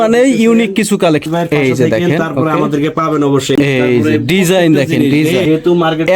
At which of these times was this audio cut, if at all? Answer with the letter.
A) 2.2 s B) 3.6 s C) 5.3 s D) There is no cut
B